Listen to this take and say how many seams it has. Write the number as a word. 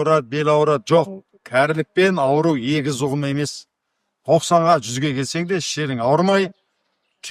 zero